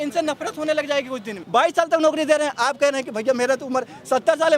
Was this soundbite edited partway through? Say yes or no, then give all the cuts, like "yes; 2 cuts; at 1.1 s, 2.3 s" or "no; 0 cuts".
yes; 1 cut; at 1.3 s